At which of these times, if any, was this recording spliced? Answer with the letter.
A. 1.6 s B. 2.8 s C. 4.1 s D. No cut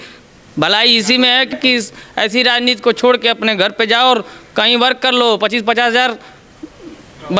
A